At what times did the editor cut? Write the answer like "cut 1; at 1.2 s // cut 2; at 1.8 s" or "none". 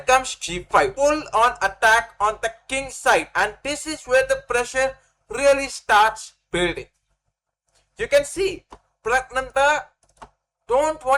cut 1; at 0.9 s